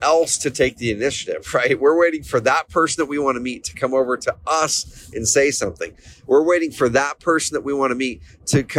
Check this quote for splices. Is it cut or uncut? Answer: uncut